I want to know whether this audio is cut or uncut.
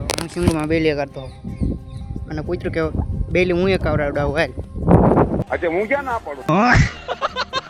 uncut